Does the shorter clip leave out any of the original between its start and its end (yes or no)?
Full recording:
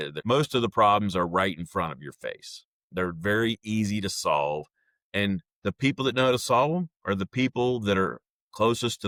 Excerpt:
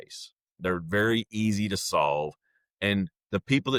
no